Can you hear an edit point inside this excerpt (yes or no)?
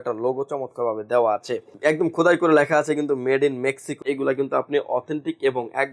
yes